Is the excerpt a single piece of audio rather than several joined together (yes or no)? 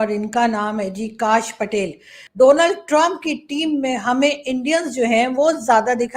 no